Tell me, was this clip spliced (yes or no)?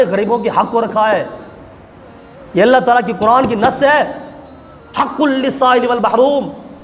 no